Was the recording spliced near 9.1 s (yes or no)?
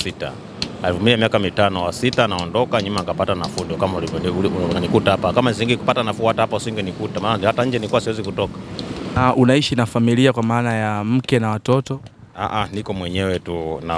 yes